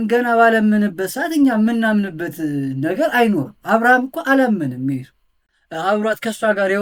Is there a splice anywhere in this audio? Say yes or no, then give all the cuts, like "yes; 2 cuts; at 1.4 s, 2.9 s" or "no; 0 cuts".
no; 0 cuts